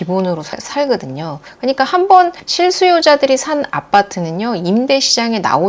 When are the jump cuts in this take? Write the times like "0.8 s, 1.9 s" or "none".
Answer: none